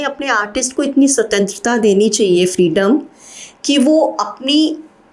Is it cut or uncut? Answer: uncut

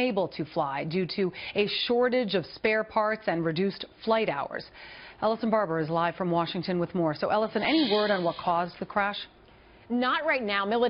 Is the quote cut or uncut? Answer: uncut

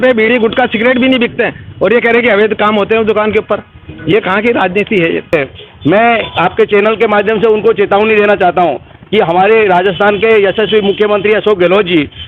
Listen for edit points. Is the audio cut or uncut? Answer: cut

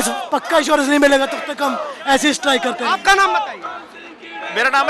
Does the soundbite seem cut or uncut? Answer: uncut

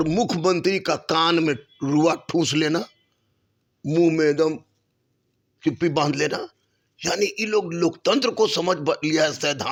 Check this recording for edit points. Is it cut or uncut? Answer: uncut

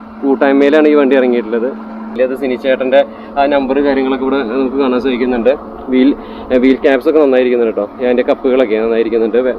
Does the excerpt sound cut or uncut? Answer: cut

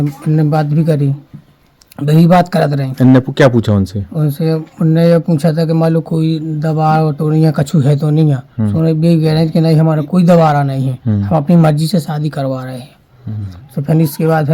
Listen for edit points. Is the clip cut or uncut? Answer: uncut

